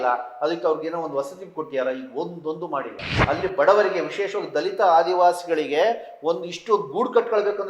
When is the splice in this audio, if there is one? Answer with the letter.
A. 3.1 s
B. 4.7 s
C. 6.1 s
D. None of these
A